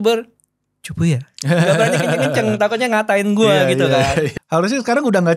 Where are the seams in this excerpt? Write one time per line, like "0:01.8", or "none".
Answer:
0:04.4

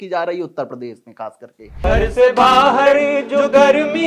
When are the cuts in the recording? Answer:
0:01.8

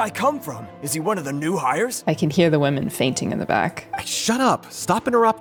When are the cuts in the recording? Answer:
none

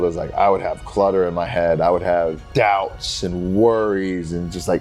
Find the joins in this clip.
0:02.4

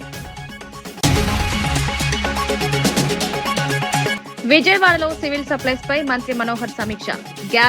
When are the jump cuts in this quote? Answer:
0:01.0
0:04.2

